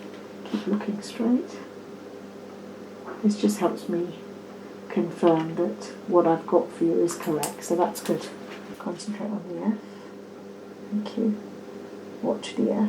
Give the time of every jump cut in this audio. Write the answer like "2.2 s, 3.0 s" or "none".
8.7 s